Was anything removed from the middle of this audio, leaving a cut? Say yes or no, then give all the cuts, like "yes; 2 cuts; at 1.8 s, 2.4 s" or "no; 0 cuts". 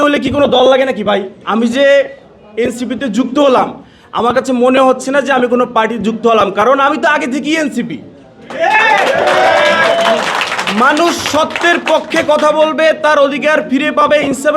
yes; 1 cut; at 1.4 s